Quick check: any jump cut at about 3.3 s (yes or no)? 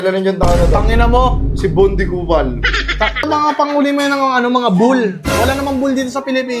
yes